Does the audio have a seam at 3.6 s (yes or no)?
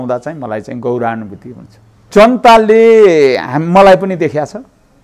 no